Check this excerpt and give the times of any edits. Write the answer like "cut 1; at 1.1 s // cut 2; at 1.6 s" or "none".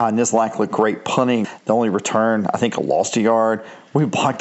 cut 1; at 1.5 s

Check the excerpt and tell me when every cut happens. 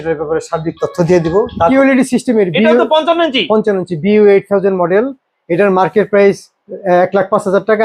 cut 1; at 1.7 s

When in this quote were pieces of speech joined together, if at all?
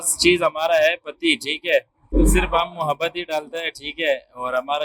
cut 1; at 2.0 s

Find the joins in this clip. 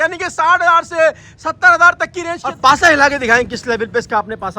cut 1; at 2.5 s

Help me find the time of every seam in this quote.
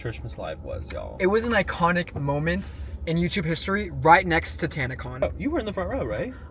none

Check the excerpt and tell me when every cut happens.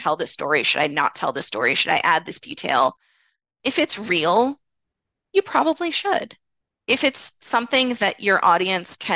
none

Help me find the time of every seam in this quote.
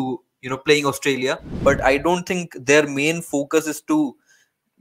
cut 1; at 1.5 s

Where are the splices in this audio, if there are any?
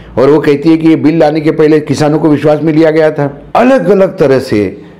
cut 1; at 3.4 s

